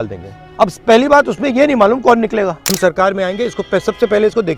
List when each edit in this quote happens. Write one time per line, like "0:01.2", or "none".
0:02.6

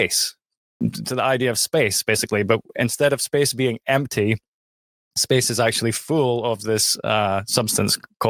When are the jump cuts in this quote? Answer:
none

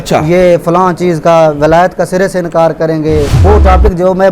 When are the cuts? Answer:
0:03.4

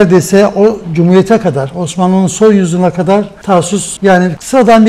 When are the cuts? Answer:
none

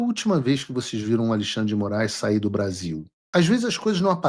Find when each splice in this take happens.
0:03.1

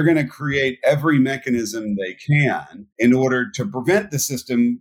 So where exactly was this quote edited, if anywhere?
none

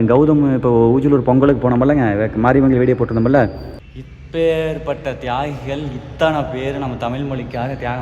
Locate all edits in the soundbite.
0:03.8

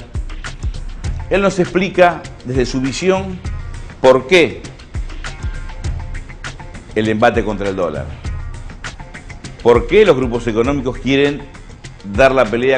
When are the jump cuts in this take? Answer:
0:04.5

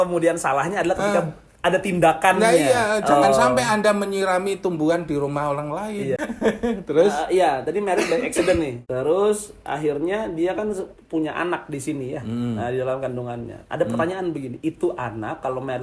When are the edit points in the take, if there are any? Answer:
0:06.2
0:08.8

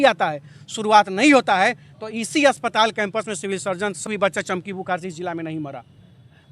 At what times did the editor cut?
0:04.0

